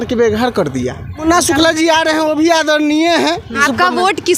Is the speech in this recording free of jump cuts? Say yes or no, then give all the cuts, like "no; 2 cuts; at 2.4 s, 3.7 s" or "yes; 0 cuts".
no; 2 cuts; at 1.2 s, 3.6 s